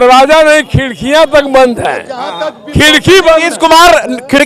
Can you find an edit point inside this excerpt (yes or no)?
no